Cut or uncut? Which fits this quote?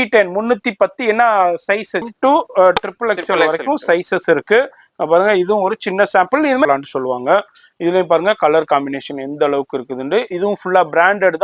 cut